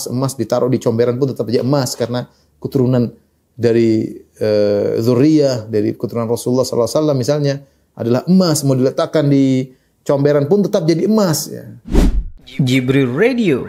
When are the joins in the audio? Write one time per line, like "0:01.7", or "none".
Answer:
0:11.7